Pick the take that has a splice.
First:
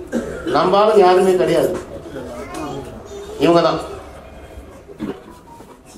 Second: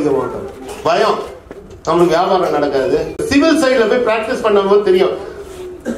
second; 1 cut; at 3.2 s

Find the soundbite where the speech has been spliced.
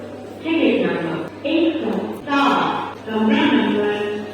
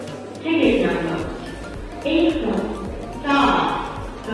first; 3 cuts; at 1.3 s, 2.2 s, 2.9 s

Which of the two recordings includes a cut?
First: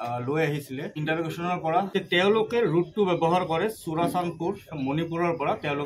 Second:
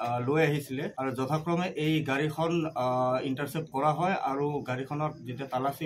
first; 2 cuts; at 0.9 s, 1.9 s

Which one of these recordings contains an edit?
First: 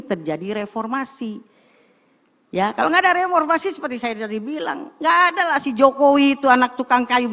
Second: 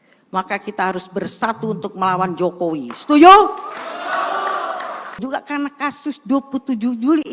second; 1 cut; at 5.2 s

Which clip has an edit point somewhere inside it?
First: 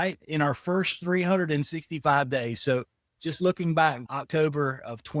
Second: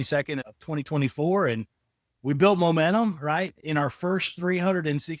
first; 1 cut; at 4.1 s

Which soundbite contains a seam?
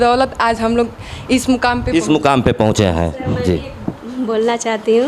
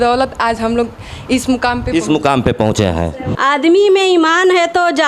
second; 1 cut; at 3.2 s

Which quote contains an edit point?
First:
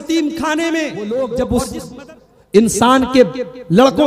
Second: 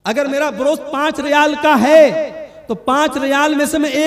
first; 1 cut; at 1.0 s

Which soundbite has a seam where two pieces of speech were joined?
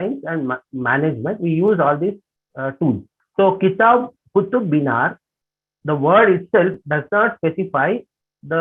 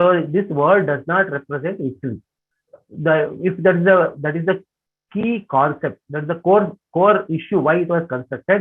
first; 1 cut; at 3.2 s

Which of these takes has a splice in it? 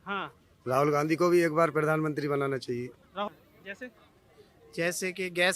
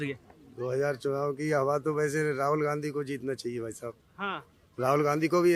first; 1 cut; at 3.3 s

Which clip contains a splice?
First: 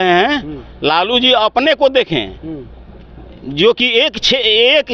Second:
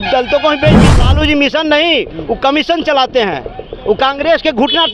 second; 1 cut; at 1.1 s

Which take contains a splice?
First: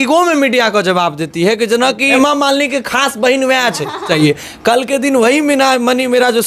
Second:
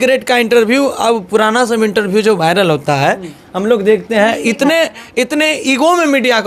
first; 2 cuts; at 2.1 s, 4.1 s

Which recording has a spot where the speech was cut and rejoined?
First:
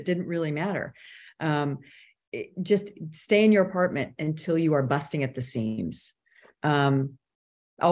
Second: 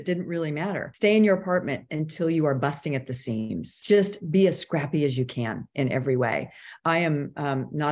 second; 2 cuts; at 0.9 s, 3.7 s

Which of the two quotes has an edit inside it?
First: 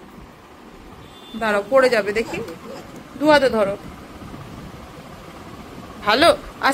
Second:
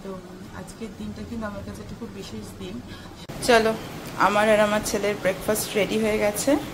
second; 1 cut; at 3.3 s

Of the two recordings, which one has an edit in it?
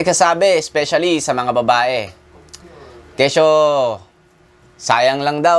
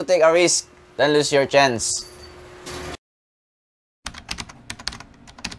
second; 1 cut; at 3.6 s

